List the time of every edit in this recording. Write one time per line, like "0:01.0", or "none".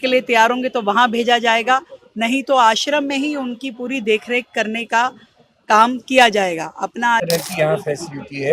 0:07.2